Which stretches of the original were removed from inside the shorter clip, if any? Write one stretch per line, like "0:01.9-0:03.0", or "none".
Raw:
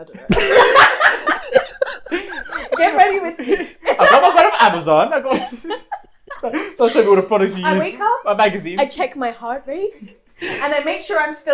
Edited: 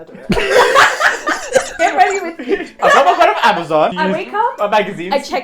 0:01.7-0:02.7
0:03.8-0:04.0
0:05.1-0:07.6

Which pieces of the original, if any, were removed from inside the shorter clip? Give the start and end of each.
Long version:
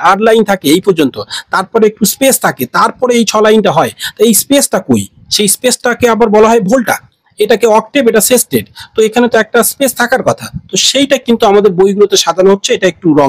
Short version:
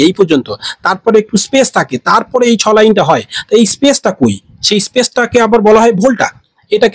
none

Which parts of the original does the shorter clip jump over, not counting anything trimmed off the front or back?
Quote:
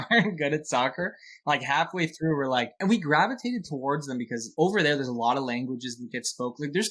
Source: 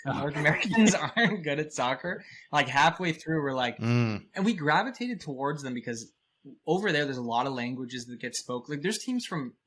0:03.8-0:04.3
0:06.0-0:06.5

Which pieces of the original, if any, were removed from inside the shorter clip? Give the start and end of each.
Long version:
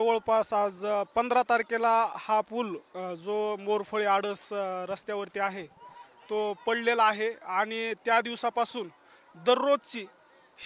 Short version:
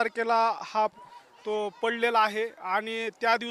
0:02.5-0:05.8

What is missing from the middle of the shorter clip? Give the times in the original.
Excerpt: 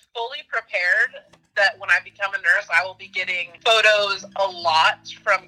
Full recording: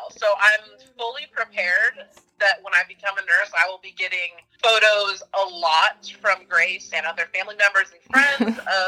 0:04.3-0:04.4

